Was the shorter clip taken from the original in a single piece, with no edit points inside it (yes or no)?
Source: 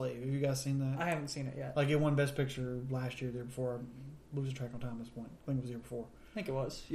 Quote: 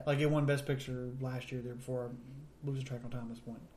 yes